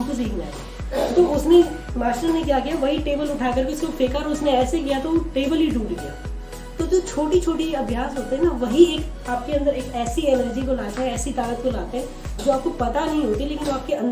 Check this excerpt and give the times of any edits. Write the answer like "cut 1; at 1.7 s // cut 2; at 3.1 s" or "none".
none